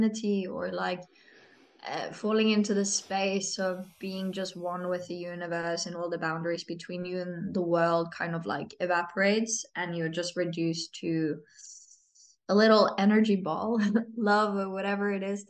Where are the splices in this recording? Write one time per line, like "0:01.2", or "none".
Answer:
none